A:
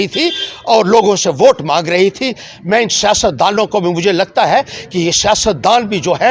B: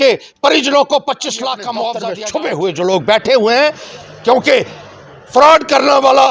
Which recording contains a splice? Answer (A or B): B